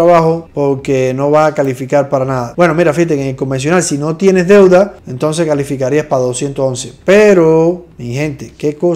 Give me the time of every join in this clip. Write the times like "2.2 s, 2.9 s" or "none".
none